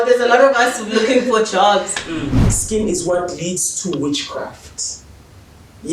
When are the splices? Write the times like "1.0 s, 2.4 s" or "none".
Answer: 2.5 s